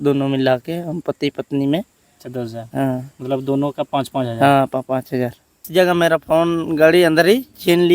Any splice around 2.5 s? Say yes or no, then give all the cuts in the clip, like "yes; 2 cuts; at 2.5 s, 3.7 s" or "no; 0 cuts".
no; 1 cut; at 5.7 s